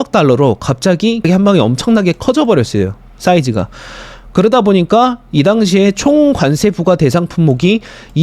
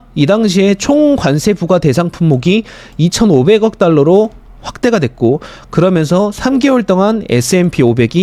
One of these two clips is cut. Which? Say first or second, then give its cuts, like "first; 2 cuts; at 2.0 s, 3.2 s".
first; 1 cut; at 1.3 s